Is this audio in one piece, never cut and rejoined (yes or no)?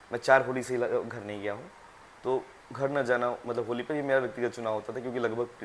yes